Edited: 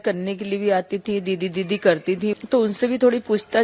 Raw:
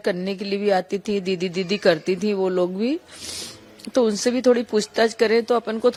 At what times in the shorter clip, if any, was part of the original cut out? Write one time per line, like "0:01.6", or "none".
0:02.4